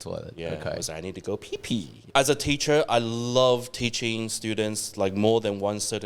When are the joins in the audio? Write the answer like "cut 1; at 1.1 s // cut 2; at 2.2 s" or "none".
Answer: cut 1; at 2.0 s